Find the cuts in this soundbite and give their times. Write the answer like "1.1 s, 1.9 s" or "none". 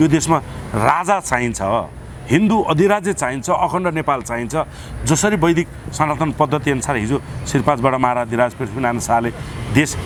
none